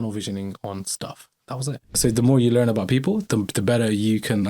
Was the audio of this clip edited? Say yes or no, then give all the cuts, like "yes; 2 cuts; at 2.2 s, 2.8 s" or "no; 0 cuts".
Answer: yes; 1 cut; at 2.0 s